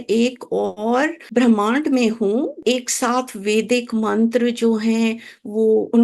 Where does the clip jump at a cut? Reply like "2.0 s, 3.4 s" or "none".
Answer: 1.2 s, 2.6 s